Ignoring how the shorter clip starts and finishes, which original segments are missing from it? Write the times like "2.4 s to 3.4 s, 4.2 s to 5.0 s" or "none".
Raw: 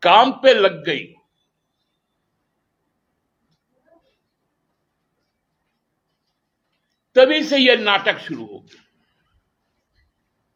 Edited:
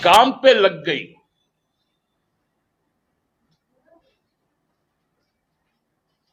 none